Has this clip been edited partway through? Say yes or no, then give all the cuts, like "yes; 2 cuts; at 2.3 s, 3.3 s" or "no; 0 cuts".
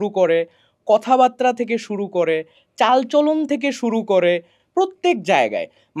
no; 0 cuts